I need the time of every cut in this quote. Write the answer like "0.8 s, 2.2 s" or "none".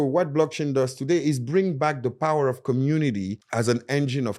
3.3 s